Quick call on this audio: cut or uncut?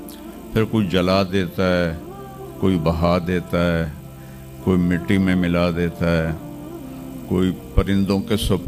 uncut